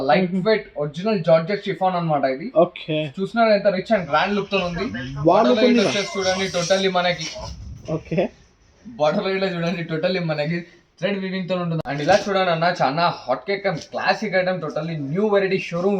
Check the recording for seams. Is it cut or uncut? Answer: cut